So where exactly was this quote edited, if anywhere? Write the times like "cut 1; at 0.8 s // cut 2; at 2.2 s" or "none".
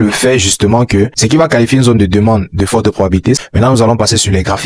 cut 1; at 1.1 s // cut 2; at 3.4 s